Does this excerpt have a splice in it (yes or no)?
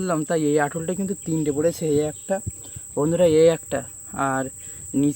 no